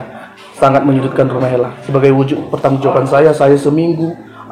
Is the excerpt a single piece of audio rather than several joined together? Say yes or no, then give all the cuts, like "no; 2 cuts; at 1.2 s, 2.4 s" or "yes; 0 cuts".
no; 1 cut; at 1.7 s